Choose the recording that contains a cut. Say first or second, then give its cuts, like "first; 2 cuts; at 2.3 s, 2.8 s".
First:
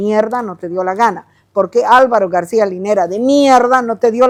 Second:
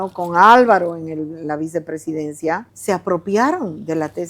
second; 1 cut; at 2.7 s